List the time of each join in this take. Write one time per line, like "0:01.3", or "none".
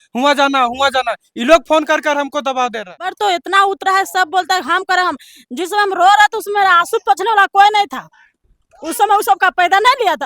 0:03.1